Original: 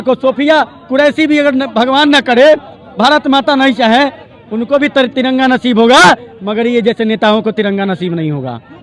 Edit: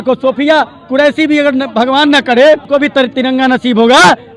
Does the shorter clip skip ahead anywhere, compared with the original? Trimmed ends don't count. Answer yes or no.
yes